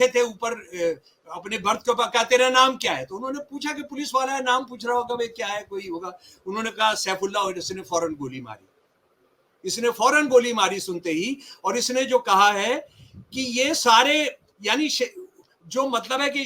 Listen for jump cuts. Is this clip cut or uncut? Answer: uncut